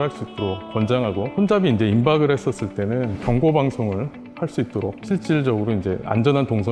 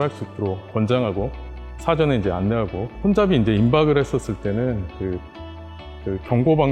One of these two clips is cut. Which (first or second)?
first